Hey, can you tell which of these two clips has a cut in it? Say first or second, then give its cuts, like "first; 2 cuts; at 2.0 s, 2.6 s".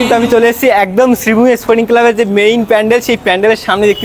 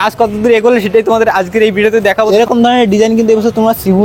second; 1 cut; at 2.3 s